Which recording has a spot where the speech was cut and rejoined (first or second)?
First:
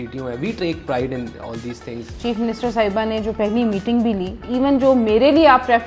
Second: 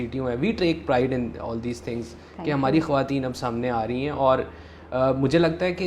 first